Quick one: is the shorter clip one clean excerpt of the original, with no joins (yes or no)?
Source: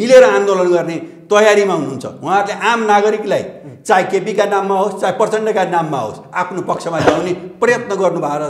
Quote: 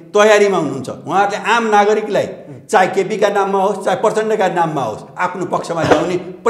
yes